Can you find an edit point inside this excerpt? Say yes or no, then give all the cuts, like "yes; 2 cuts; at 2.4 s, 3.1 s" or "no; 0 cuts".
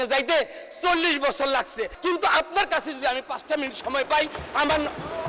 yes; 1 cut; at 1.9 s